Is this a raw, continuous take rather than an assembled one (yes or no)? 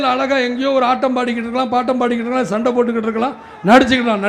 yes